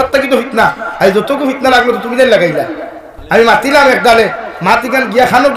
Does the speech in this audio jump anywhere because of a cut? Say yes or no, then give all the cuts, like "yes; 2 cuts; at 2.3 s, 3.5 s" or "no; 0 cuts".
no; 0 cuts